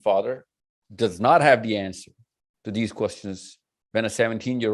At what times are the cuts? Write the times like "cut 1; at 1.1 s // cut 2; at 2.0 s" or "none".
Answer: none